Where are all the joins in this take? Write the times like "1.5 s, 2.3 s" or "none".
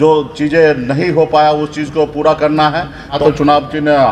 3.2 s